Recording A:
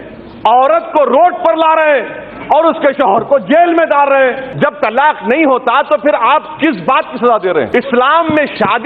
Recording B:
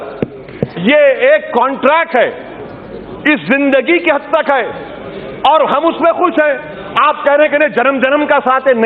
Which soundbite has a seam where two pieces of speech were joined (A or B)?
A